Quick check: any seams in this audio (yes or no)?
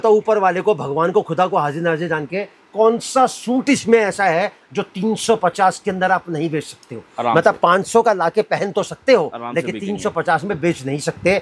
no